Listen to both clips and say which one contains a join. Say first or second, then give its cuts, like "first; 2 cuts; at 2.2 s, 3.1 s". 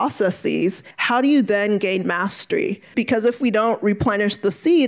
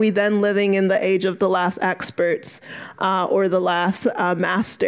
first; 2 cuts; at 0.9 s, 2.9 s